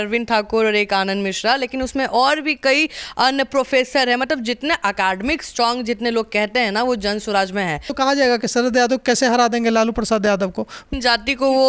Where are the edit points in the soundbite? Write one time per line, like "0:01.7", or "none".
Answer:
0:07.9
0:10.8